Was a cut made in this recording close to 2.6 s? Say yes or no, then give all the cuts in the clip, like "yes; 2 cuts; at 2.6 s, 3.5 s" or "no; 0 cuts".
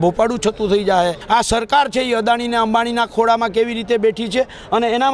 no; 1 cut; at 1.2 s